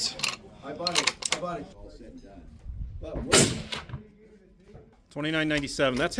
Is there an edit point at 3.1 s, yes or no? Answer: no